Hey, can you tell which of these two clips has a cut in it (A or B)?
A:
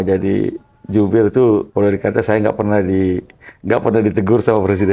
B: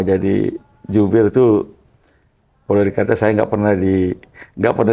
A